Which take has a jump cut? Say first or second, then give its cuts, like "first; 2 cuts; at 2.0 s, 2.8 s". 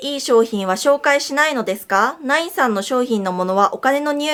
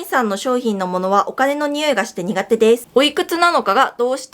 second; 1 cut; at 2.8 s